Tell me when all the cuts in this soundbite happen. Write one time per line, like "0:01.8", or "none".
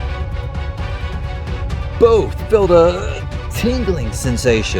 0:02.0